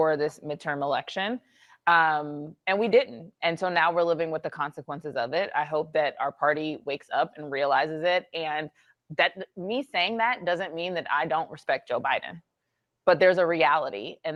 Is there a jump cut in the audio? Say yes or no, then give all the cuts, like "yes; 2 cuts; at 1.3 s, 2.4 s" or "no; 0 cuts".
no; 0 cuts